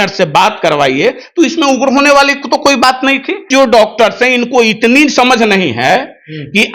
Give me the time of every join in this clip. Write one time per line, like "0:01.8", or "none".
0:03.5